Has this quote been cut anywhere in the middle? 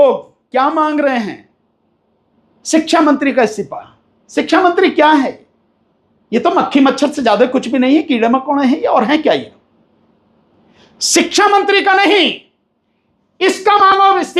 no; 0 cuts

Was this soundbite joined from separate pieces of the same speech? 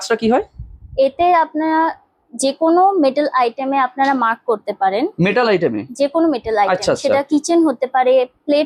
no; 0 cuts

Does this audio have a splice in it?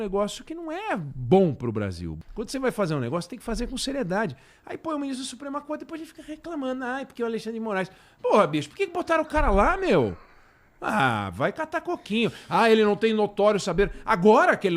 yes; 1 cut; at 2.1 s

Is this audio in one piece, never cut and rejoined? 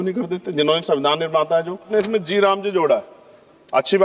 no; 1 cut; at 1.9 s

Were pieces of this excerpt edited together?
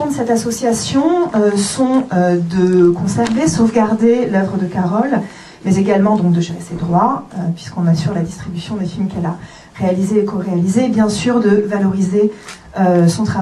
no; 0 cuts

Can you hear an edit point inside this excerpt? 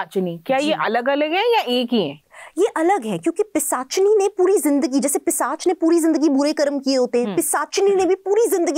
no; 0 cuts

